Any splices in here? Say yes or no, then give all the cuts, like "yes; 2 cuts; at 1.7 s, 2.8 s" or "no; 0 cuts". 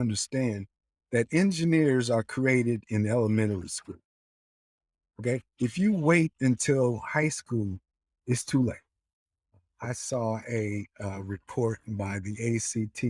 no; 0 cuts